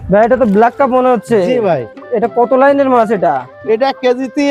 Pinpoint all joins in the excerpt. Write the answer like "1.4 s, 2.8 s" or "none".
none